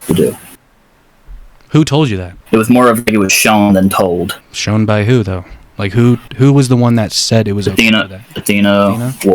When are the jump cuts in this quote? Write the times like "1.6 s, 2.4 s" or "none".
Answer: 2.3 s, 4.5 s